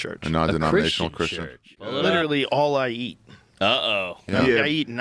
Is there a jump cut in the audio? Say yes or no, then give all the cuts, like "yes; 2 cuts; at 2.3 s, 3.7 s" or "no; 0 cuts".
yes; 1 cut; at 1.9 s